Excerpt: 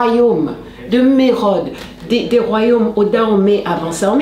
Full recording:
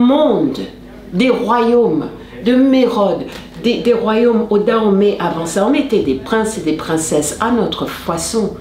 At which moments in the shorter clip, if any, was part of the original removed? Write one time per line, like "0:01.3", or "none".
none